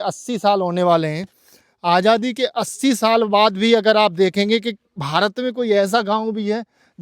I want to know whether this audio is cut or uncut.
uncut